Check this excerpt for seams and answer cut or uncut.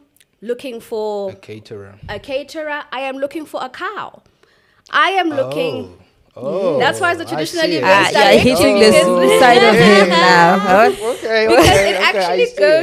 uncut